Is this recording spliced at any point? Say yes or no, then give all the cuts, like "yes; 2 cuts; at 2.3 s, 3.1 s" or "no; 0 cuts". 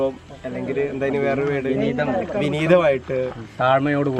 no; 0 cuts